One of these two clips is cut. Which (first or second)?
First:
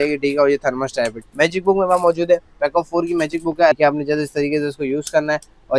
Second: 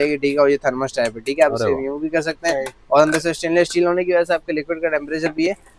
first